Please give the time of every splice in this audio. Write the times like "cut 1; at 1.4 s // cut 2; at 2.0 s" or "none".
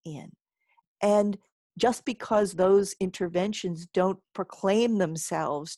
none